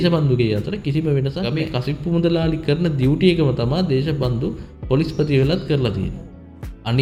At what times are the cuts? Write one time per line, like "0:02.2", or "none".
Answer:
none